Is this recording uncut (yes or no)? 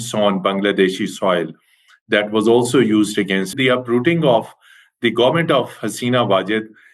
no